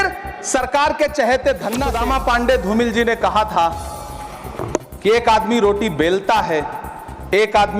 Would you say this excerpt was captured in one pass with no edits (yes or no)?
no